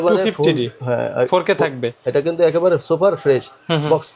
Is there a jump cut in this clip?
yes; 1 cut; at 1.9 s

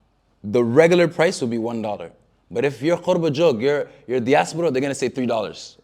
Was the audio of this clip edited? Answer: no; 0 cuts

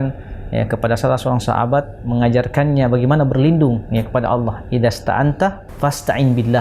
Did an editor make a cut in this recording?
yes; 1 cut; at 5.7 s

